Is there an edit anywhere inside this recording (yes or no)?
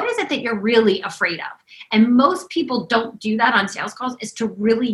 no